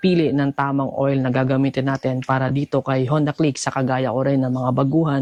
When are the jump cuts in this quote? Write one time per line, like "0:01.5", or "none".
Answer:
none